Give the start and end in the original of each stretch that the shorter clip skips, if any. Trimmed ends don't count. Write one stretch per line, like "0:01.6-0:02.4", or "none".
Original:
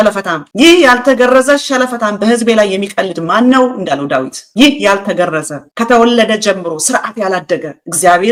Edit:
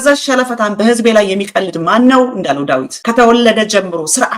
0:04.4-0:05.7